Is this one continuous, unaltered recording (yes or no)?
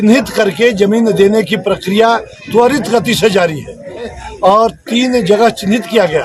no